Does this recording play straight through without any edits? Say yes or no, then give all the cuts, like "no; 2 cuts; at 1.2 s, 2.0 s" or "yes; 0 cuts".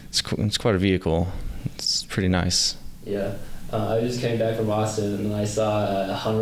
yes; 0 cuts